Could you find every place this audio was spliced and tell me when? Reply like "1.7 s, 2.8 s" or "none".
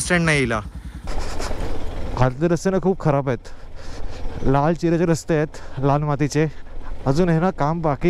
1.0 s